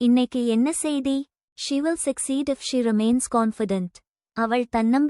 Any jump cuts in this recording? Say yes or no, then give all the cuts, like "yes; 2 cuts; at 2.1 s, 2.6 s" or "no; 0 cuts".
yes; 1 cut; at 1.5 s